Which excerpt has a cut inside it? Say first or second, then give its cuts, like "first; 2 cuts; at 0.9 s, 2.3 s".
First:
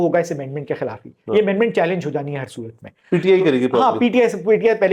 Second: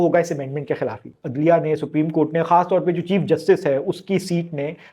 second; 1 cut; at 1.1 s